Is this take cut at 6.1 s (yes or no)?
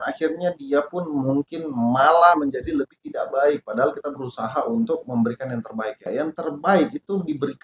yes